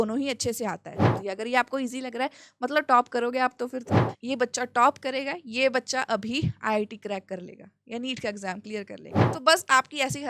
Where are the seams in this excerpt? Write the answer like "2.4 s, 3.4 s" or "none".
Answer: 1.1 s, 4.0 s, 9.3 s